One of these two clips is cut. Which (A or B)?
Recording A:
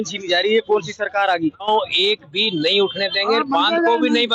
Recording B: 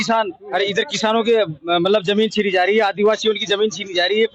A